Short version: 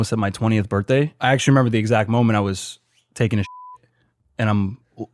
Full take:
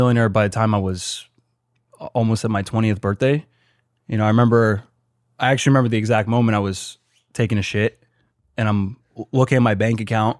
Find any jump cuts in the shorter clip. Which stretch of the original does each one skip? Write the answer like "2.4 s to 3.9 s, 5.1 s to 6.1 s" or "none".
3.5 s to 5.3 s